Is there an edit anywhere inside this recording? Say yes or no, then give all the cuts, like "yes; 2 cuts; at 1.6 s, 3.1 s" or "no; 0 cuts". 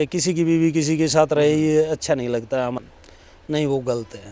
yes; 1 cut; at 2.8 s